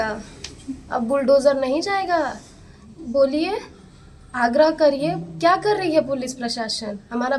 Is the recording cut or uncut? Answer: uncut